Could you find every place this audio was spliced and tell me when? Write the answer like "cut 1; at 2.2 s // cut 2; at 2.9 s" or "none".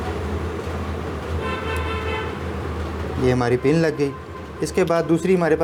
none